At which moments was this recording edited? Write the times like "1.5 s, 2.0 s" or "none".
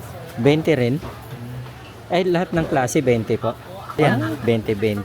4.0 s